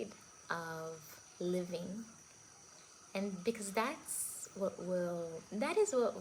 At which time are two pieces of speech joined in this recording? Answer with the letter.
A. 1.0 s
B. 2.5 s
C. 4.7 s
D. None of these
D